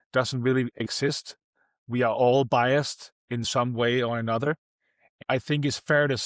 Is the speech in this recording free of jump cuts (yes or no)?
no